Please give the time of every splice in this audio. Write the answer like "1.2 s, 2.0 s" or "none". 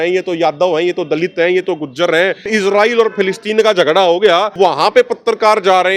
2.5 s, 4.5 s